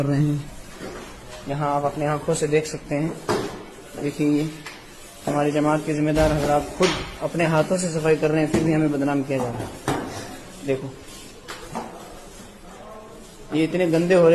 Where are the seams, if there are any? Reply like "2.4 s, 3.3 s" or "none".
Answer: none